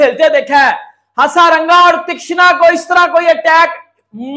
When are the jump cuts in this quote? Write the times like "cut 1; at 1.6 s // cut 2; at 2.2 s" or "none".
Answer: none